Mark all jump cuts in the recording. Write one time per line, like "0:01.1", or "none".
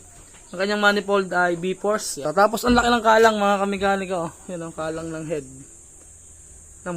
0:02.2